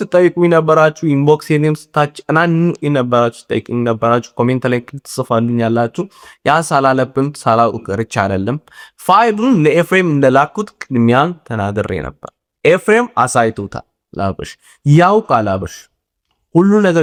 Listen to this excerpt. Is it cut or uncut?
uncut